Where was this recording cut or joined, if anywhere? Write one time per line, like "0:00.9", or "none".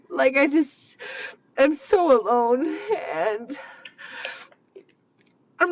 none